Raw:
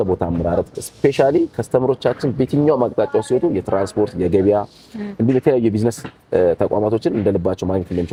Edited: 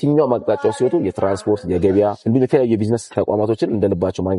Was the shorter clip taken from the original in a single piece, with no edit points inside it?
no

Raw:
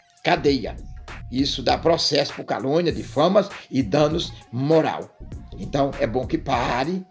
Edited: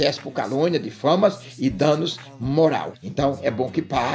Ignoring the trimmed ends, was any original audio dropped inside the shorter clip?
yes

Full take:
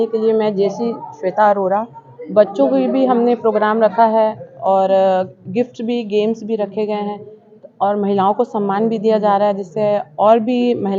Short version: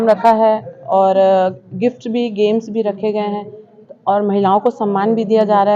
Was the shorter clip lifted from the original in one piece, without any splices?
yes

